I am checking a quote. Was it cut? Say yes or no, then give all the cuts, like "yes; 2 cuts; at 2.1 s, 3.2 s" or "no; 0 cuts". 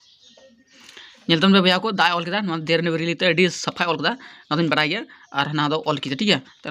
no; 0 cuts